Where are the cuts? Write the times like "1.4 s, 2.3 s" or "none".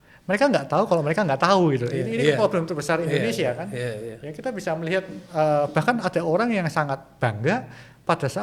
none